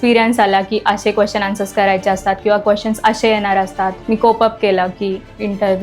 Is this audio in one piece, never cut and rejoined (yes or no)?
no